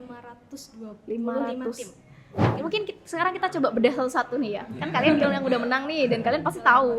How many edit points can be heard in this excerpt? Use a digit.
1